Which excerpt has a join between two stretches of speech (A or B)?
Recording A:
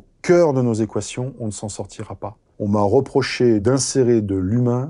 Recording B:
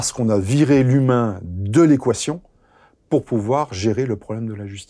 A